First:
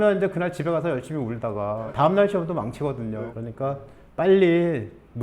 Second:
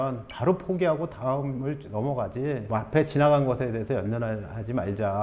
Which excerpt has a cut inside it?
first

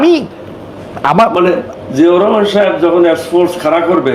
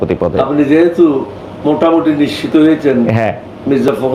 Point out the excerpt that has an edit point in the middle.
first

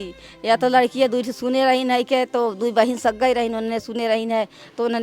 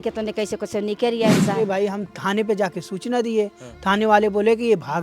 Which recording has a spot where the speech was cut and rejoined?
second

